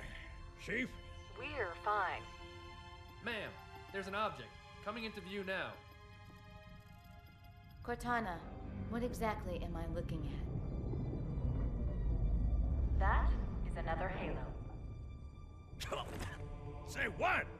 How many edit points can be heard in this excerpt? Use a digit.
1